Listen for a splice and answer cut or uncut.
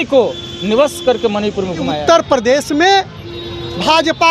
cut